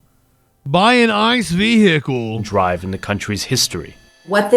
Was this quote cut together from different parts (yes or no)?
no